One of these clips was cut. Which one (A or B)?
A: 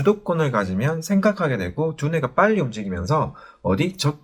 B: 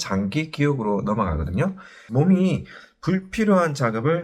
B